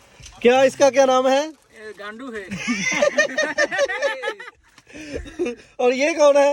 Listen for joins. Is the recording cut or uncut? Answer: uncut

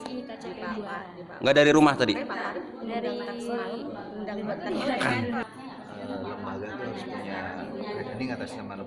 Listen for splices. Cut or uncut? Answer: cut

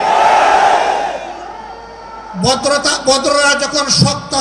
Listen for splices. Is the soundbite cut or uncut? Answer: uncut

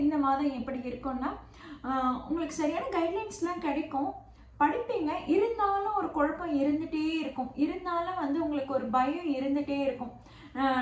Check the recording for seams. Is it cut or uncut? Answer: uncut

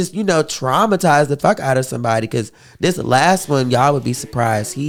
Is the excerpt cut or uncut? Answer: uncut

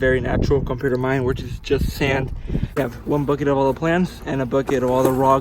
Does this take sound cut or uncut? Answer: cut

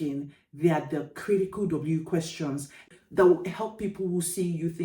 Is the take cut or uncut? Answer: cut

